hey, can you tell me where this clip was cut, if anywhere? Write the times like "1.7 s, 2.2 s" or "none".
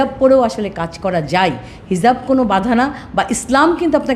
none